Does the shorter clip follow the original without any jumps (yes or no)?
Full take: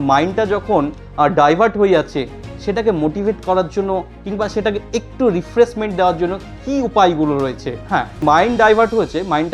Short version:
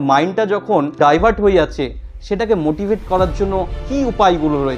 no